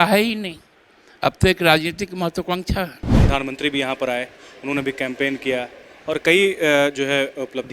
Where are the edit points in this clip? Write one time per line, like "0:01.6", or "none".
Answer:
0:03.2